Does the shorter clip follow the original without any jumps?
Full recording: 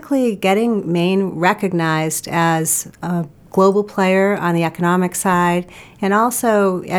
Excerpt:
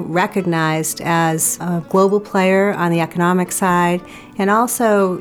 no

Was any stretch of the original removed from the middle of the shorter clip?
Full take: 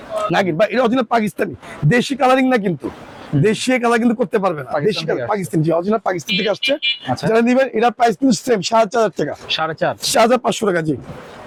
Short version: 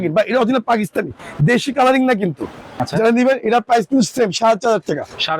yes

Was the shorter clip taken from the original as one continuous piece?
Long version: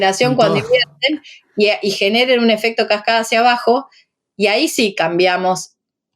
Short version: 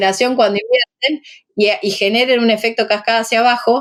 yes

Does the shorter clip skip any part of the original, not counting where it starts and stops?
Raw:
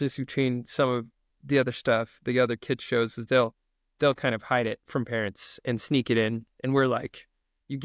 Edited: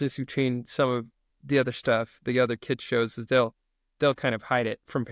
no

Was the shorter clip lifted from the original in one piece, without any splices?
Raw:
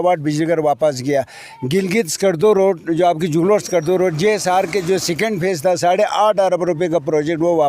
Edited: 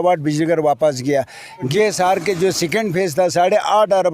no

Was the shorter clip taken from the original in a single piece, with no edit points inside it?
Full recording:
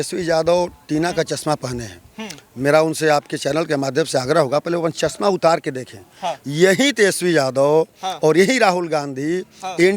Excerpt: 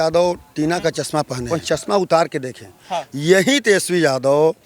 no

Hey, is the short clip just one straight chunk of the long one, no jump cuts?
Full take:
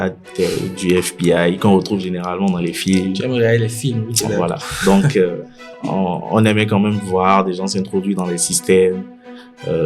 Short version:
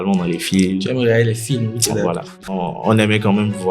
no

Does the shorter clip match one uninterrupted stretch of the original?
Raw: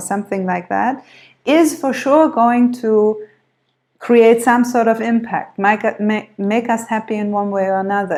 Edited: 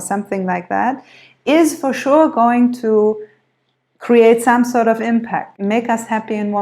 no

